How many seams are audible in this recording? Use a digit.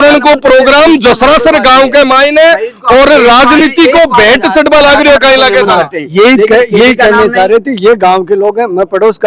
0